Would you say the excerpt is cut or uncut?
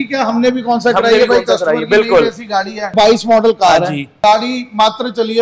cut